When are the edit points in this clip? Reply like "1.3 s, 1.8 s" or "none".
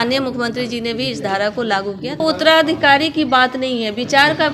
2.2 s